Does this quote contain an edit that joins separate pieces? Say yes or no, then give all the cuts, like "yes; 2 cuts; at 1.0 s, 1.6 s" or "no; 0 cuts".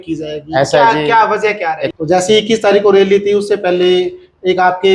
yes; 1 cut; at 1.9 s